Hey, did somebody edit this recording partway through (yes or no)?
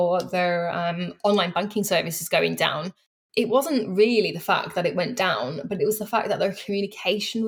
yes